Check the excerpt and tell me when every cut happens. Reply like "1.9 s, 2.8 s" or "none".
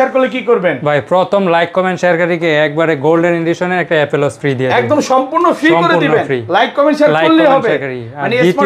none